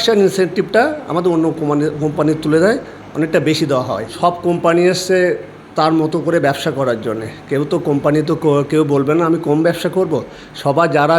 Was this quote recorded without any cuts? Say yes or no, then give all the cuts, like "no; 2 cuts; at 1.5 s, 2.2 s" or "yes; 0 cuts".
no; 1 cut; at 4.1 s